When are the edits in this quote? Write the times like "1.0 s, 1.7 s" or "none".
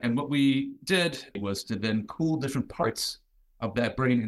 1.4 s